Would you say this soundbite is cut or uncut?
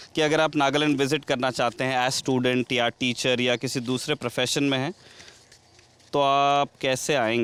uncut